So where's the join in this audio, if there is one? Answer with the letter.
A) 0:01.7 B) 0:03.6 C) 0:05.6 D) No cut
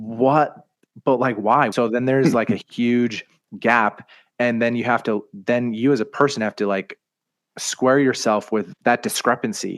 A